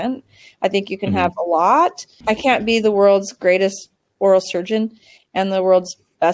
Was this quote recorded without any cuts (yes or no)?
no